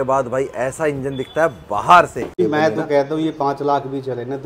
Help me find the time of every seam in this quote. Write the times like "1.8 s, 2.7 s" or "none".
2.4 s